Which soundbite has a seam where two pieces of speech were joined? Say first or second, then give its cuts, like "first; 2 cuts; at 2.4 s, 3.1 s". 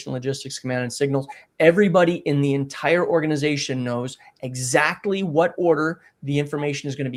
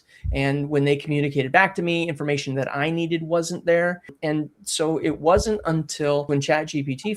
second; 2 cuts; at 4.1 s, 6.3 s